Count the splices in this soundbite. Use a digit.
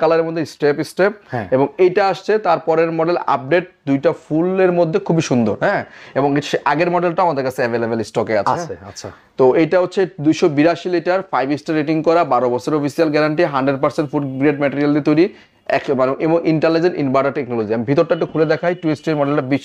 0